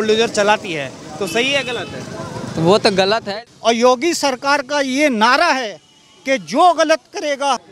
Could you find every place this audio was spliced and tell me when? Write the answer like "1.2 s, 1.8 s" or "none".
3.2 s